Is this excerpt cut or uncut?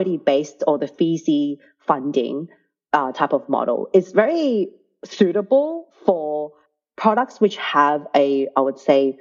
uncut